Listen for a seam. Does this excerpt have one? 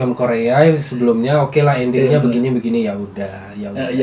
no; 0 cuts

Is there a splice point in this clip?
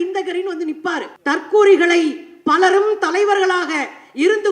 yes; 1 cut; at 1.1 s

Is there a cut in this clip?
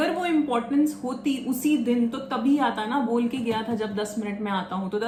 no; 0 cuts

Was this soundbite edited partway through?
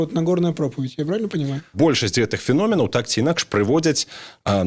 yes; 1 cut; at 1.7 s

